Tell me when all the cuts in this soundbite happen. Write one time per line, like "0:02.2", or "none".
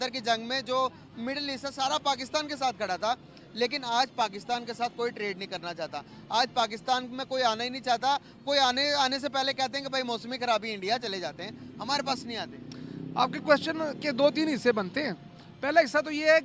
none